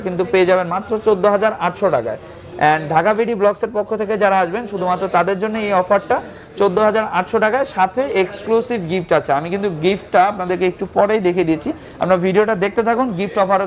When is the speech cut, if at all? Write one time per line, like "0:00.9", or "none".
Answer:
none